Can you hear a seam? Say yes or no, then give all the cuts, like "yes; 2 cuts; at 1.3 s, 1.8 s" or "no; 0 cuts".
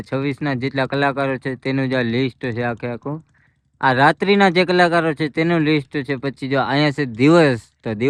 no; 0 cuts